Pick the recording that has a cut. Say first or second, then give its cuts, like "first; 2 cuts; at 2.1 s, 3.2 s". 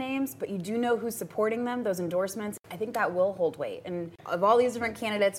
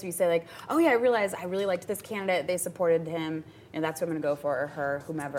first; 2 cuts; at 2.6 s, 4.2 s